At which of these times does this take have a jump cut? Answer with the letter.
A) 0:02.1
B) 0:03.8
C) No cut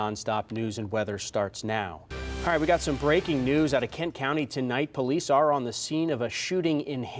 A